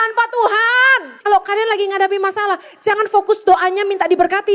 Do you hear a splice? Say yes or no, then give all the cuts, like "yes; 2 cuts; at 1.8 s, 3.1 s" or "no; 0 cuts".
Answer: yes; 1 cut; at 1.1 s